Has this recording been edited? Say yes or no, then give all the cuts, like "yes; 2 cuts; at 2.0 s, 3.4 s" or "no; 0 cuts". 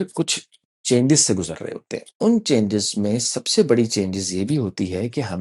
yes; 1 cut; at 2.0 s